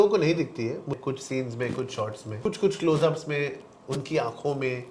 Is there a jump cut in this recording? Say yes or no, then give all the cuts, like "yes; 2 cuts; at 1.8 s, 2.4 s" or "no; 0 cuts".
yes; 2 cuts; at 0.9 s, 2.4 s